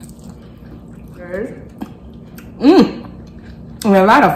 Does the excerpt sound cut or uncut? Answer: cut